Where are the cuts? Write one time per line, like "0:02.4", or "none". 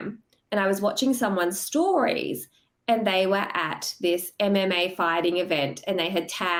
none